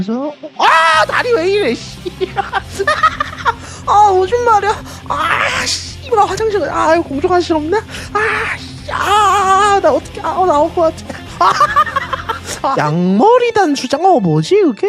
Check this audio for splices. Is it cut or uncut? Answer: cut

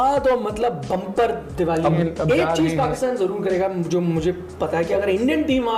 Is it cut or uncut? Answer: cut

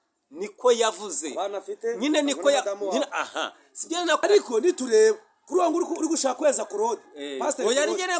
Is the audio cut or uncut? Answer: cut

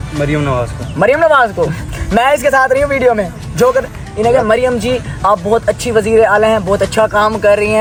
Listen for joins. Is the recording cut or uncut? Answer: uncut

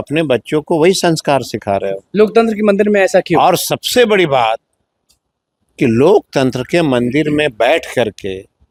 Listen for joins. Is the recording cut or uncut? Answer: uncut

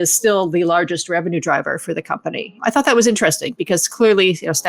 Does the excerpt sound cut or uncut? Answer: cut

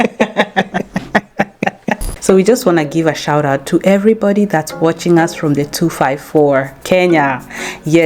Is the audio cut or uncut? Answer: cut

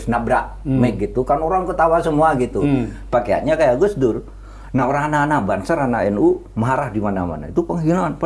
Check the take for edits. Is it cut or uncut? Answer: uncut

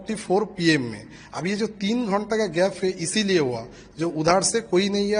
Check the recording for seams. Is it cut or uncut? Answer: uncut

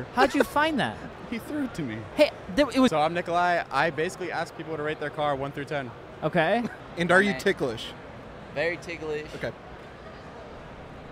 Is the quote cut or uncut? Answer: cut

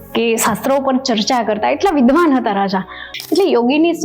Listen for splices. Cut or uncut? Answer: cut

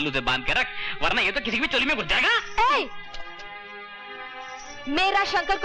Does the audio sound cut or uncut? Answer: uncut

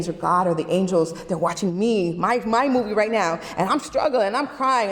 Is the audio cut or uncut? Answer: uncut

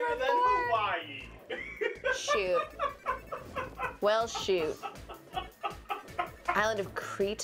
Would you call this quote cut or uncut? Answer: uncut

